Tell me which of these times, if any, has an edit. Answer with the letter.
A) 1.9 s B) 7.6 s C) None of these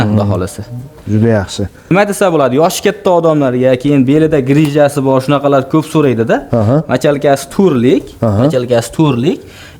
A